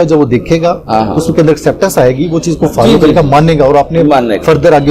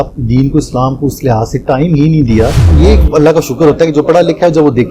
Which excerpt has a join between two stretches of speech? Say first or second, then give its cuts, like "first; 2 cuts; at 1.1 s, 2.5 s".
second; 1 cut; at 2.6 s